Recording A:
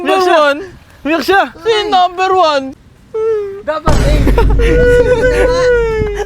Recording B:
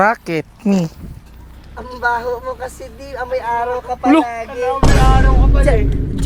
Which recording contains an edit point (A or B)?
A